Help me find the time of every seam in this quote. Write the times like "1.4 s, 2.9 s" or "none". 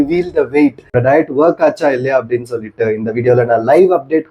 1.0 s